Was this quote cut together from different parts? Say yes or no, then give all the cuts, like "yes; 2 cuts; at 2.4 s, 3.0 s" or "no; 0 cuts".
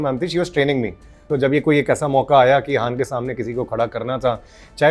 yes; 1 cut; at 1.2 s